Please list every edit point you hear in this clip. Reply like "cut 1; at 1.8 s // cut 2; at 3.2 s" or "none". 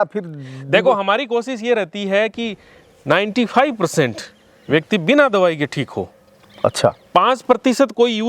none